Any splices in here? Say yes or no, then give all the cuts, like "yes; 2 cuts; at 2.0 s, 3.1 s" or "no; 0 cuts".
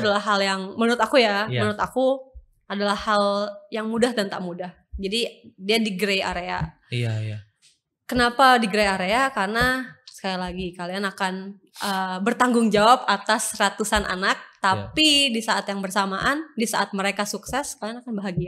no; 0 cuts